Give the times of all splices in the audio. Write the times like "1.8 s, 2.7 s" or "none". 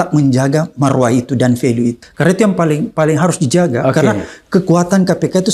2.1 s